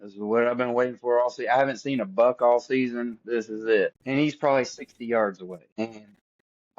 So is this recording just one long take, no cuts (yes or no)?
no